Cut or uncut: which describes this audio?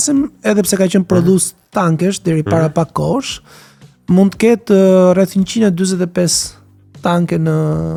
uncut